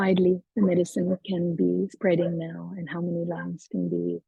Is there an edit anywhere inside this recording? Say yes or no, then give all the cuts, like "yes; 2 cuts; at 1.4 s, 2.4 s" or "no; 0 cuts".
no; 0 cuts